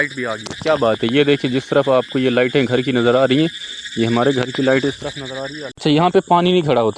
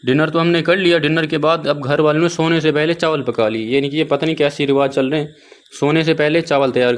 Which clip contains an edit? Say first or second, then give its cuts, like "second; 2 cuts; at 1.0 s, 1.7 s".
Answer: first; 1 cut; at 5.8 s